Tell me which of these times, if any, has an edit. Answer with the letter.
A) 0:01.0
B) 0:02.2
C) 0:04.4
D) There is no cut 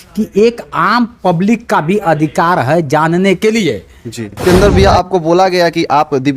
C